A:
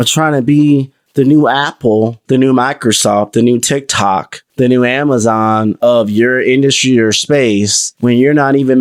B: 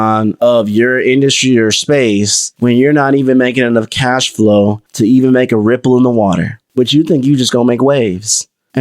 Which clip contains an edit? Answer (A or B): B